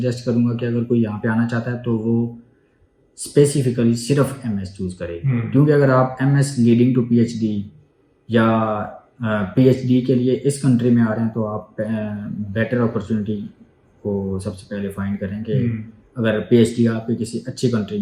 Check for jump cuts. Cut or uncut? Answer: uncut